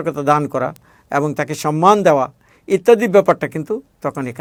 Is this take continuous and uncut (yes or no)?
yes